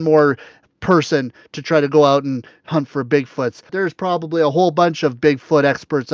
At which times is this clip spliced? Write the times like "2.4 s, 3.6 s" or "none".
3.7 s

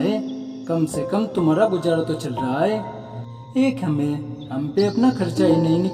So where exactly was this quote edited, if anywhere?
none

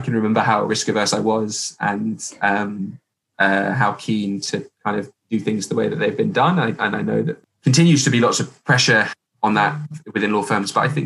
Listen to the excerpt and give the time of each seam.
7.5 s

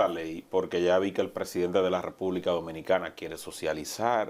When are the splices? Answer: none

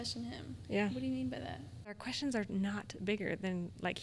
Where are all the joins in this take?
2.0 s

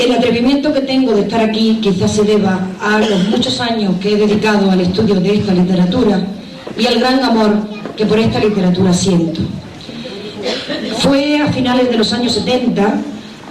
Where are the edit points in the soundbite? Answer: 2.8 s

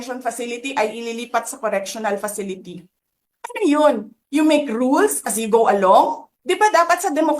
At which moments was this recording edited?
6.3 s

